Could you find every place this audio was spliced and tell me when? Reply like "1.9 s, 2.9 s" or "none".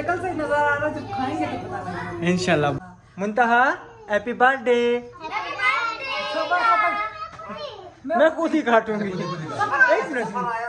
2.8 s